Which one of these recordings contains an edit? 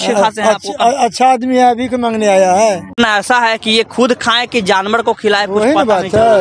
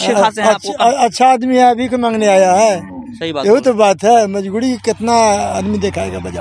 first; 1 cut; at 3.0 s

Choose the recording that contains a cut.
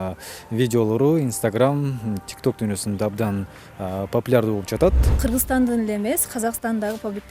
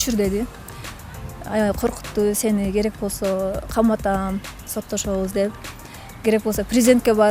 first; 1 cut; at 5.1 s

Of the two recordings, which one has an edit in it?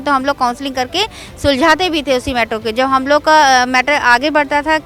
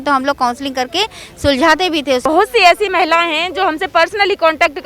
second; 1 cut; at 2.2 s

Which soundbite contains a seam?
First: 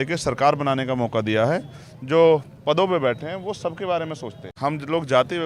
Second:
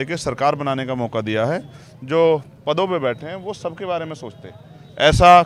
first; 1 cut; at 4.5 s

